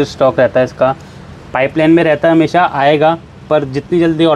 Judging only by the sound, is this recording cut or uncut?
uncut